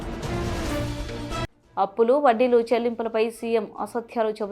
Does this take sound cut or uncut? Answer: cut